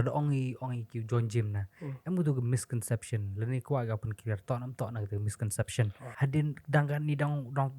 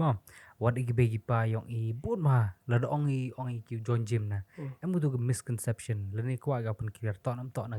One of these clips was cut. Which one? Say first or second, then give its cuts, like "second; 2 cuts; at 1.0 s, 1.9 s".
first; 1 cut; at 6.0 s